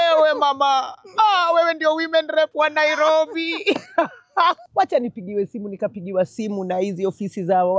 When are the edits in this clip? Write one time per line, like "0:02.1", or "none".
0:04.6